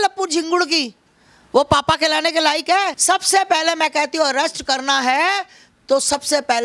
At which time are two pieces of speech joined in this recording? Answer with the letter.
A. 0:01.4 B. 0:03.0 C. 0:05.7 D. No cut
B